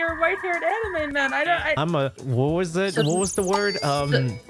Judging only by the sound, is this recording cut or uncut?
cut